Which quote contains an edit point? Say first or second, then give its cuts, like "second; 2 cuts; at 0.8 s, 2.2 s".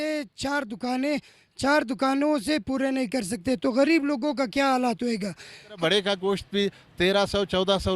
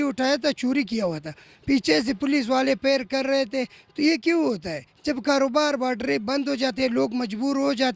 first; 1 cut; at 5.8 s